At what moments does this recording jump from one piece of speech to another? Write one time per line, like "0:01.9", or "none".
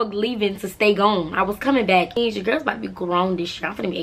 0:02.2